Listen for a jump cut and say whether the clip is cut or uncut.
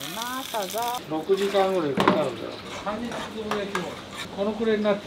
cut